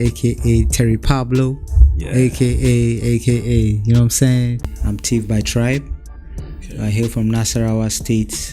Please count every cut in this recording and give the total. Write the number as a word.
one